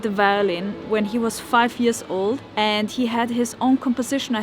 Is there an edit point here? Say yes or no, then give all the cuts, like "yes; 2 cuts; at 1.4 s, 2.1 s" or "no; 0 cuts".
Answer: yes; 1 cut; at 2.5 s